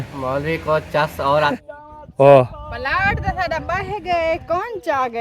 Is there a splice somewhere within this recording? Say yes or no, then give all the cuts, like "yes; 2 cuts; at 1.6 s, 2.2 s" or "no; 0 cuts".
yes; 1 cut; at 1.5 s